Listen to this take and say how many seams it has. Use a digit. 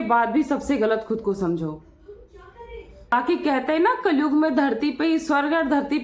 1